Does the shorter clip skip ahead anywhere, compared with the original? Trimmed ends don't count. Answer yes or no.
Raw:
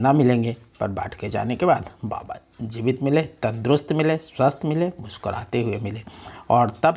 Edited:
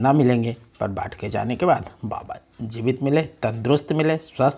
no